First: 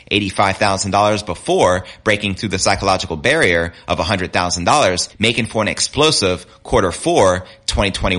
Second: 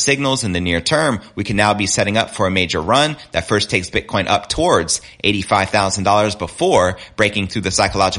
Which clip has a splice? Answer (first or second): first